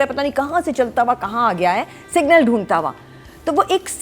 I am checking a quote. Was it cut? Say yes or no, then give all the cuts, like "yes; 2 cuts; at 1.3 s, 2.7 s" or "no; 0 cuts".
no; 0 cuts